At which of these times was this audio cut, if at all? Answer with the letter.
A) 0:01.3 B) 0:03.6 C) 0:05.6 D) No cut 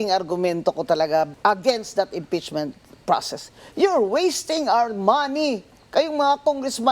A